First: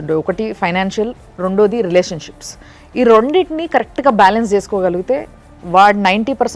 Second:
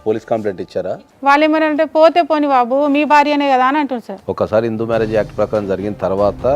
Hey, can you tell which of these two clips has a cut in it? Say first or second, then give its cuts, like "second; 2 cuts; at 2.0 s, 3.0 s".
second; 2 cuts; at 0.9 s, 4.1 s